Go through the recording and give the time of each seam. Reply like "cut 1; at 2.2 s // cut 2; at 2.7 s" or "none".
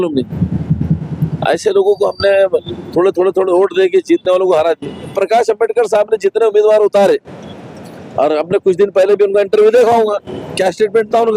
cut 1; at 5.1 s